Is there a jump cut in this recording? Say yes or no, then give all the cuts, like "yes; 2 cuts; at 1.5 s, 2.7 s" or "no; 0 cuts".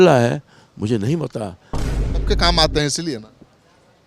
yes; 1 cut; at 2.1 s